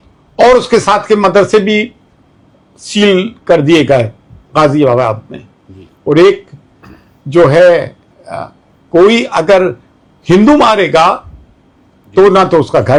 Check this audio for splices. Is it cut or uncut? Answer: uncut